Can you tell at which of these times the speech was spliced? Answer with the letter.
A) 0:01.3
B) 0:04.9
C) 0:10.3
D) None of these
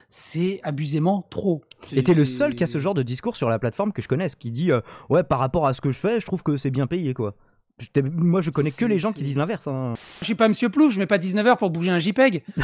C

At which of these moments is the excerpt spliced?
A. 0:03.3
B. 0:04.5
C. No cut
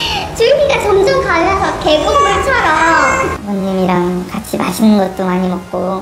C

